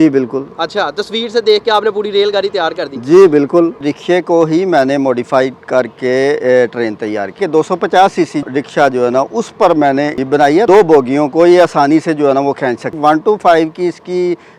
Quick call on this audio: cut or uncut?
cut